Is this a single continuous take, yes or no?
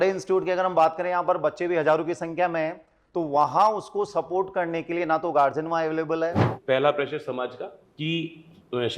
no